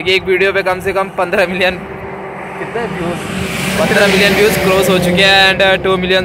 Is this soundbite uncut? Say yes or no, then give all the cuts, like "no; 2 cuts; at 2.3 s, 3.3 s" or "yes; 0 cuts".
yes; 0 cuts